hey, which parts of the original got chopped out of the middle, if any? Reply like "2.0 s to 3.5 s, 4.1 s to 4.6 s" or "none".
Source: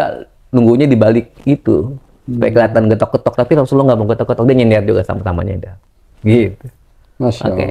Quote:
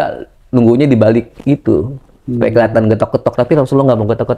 none